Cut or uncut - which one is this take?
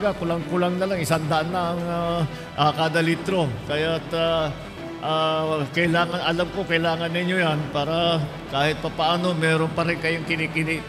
uncut